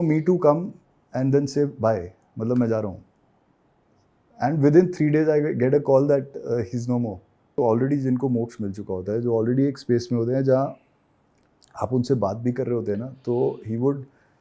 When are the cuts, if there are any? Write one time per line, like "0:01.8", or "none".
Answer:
0:07.6